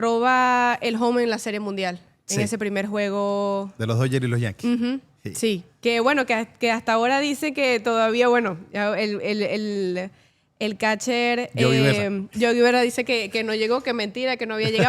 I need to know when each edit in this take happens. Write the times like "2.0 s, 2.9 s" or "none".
none

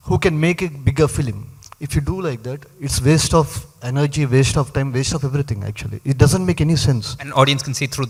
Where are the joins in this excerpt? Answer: none

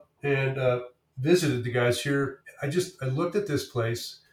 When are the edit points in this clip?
2.4 s

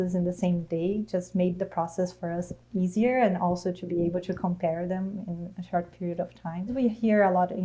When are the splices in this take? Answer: 5.5 s, 6.7 s

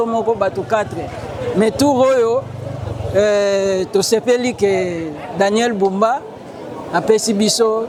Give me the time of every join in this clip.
none

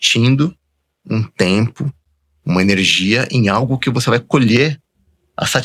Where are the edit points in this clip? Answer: none

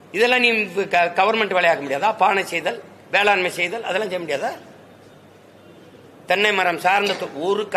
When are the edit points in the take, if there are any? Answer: none

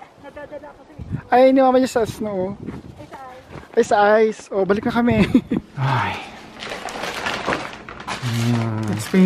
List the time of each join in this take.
5.6 s

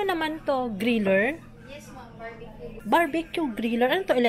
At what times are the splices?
2.8 s

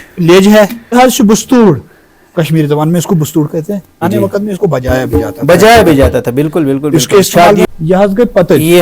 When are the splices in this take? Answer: 0.9 s, 4.0 s, 7.7 s

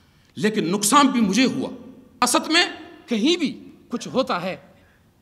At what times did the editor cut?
2.2 s

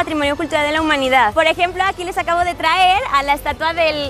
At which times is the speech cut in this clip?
1.3 s

